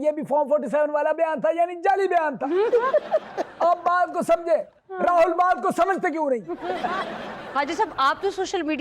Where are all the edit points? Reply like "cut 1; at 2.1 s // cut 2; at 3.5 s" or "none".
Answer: none